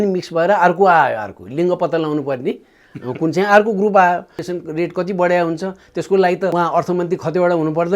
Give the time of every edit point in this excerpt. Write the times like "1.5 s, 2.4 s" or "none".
4.4 s, 6.5 s